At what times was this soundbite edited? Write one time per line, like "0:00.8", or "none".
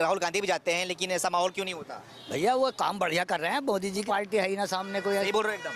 0:04.0